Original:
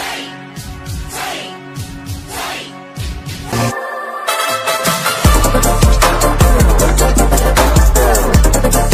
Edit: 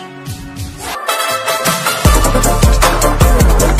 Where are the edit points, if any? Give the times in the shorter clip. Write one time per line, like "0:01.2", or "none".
0:01.0